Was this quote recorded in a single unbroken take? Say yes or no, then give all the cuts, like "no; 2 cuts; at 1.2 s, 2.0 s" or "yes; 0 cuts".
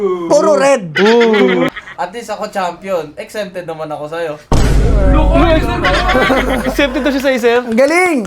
no; 1 cut; at 1.7 s